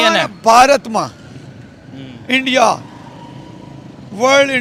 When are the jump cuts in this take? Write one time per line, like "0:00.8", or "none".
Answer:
none